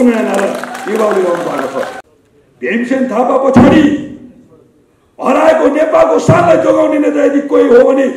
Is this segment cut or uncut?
cut